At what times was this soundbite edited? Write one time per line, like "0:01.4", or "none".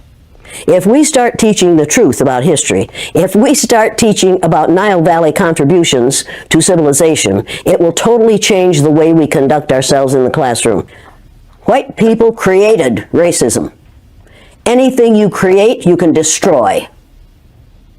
0:10.9